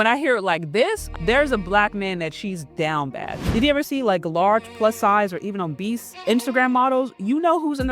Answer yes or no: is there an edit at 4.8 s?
no